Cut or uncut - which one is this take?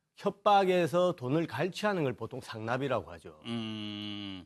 uncut